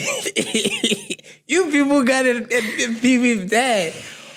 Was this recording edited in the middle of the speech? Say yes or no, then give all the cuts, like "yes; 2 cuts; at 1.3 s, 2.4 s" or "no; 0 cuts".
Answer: no; 0 cuts